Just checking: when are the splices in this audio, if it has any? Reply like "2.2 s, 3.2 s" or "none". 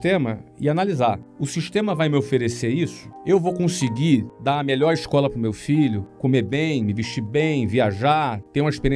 none